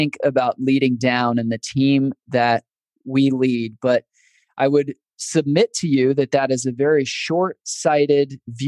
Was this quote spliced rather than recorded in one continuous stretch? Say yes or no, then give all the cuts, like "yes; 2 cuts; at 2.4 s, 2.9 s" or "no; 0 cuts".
no; 0 cuts